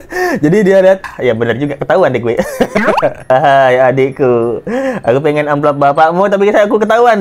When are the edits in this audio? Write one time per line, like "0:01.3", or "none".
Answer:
0:01.1
0:03.3